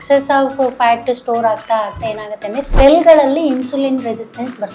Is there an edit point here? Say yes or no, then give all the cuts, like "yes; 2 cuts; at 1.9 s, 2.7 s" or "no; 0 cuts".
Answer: no; 0 cuts